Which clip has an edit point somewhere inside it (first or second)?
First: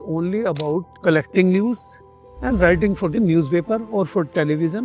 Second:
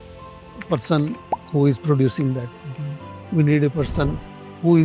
first